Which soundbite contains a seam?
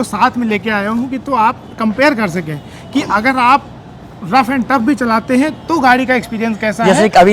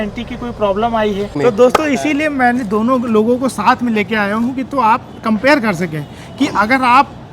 second; 1 cut; at 1.4 s

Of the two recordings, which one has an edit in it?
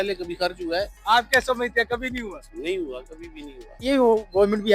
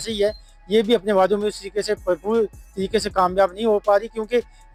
first; 2 cuts; at 1.0 s, 3.9 s

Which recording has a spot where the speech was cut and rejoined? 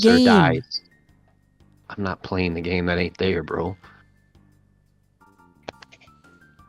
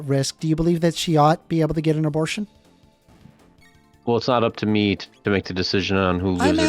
second; 1 cut; at 3.6 s

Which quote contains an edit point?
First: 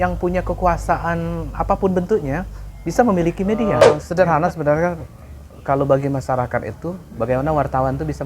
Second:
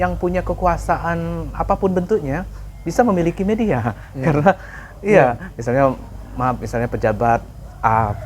first; 1 cut; at 4.0 s

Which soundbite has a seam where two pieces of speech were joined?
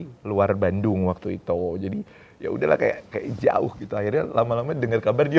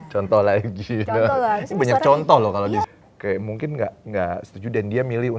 second; 1 cut; at 2.9 s

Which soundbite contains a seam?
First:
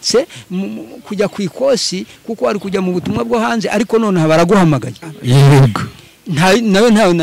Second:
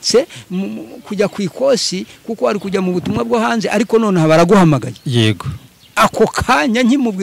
first; 1 cut; at 5.0 s

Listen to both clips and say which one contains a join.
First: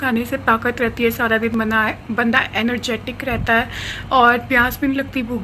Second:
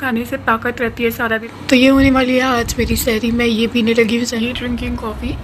second; 2 cuts; at 1.4 s, 4.3 s

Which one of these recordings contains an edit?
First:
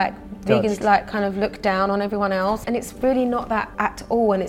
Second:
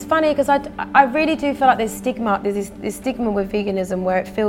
first; 2 cuts; at 2.6 s, 3.7 s

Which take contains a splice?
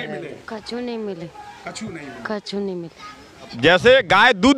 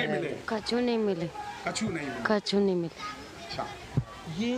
first; 1 cut; at 3.5 s

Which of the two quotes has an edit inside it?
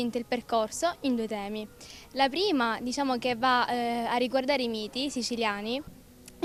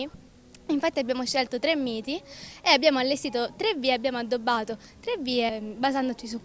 second; 1 cut; at 5.5 s

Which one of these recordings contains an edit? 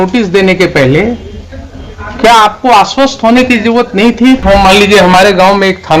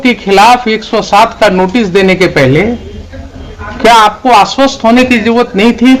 first; 1 cut; at 4.4 s

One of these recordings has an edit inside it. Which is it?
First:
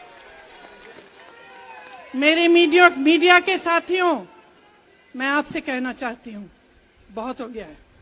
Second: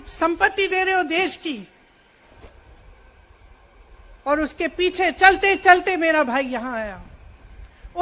second; 1 cut; at 2.2 s

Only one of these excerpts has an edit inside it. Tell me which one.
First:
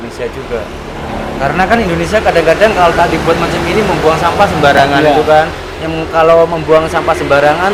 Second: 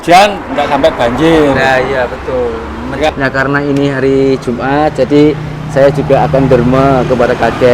second; 1 cut; at 3.1 s

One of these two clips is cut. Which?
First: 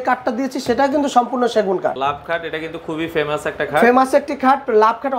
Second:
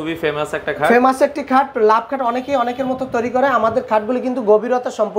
first; 1 cut; at 2.0 s

